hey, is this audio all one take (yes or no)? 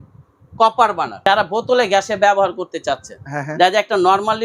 no